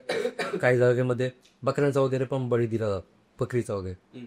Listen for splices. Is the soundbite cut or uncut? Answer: uncut